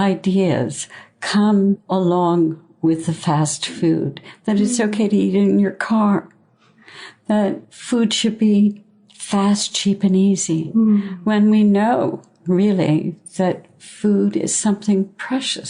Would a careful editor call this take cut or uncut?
cut